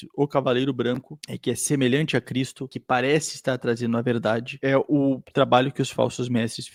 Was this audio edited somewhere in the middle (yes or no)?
no